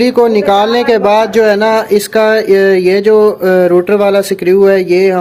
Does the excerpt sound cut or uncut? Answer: uncut